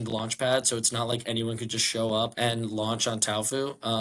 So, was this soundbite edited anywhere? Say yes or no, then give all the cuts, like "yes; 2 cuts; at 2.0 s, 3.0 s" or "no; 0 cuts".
yes; 1 cut; at 2.3 s